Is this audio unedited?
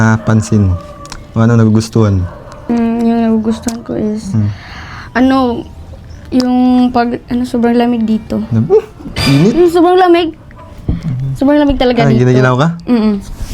no; 1 cut; at 2.7 s

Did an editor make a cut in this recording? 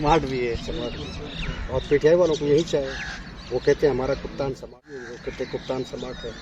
yes; 1 cut; at 4.9 s

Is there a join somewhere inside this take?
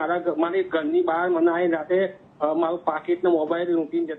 no; 0 cuts

